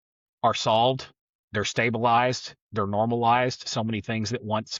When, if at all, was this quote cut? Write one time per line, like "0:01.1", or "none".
none